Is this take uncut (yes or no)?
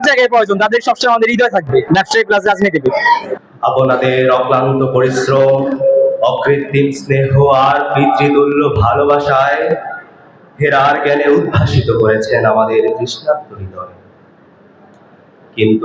yes